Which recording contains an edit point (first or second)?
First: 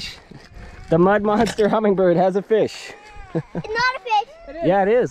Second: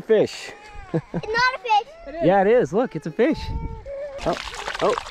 second